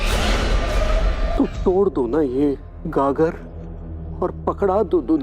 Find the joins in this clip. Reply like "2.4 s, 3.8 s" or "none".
none